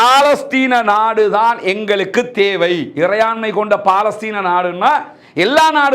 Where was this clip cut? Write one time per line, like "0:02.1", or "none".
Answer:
none